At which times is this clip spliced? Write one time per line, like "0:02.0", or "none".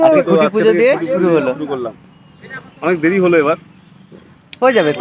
none